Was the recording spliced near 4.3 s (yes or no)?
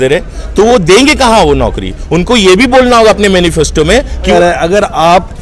yes